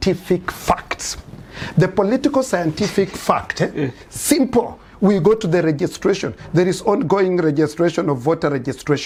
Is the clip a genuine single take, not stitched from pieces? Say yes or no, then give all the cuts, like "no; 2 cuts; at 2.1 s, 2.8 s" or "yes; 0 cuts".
yes; 0 cuts